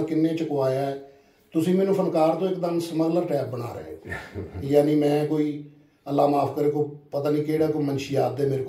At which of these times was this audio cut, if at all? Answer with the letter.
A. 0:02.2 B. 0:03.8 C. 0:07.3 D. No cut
D